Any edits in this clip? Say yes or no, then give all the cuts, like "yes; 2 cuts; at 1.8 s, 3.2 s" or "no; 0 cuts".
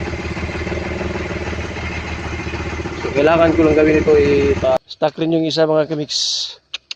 yes; 1 cut; at 4.8 s